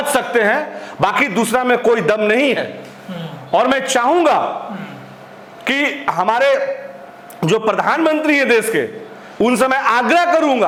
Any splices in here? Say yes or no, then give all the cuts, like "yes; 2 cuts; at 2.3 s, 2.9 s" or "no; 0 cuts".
no; 0 cuts